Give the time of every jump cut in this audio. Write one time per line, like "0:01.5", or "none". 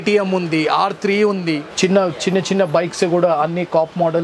0:01.7